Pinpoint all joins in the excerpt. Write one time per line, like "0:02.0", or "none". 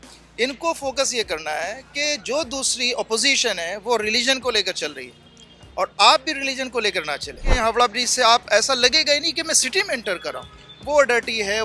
0:07.5

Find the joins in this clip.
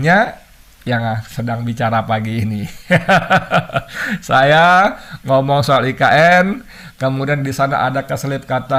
none

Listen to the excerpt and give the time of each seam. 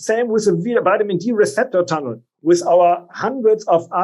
0:02.3

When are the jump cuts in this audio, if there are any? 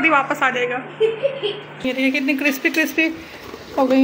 0:01.8

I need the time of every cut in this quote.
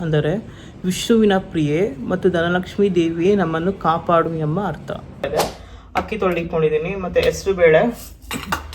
0:05.3

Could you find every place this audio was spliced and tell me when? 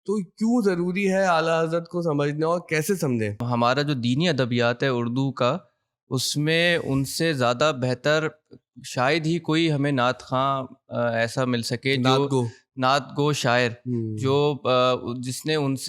0:03.4

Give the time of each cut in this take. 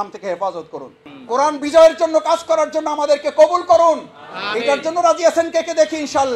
none

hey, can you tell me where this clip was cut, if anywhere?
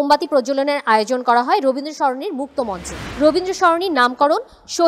0:03.1

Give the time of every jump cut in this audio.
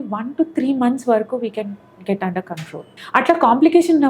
0:03.0

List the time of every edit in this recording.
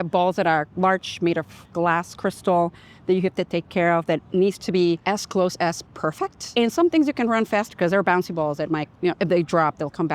0:05.0
0:06.4

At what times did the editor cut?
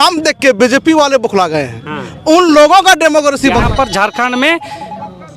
0:03.6

